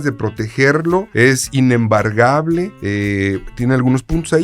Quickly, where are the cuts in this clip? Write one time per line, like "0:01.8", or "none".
0:01.1
0:02.8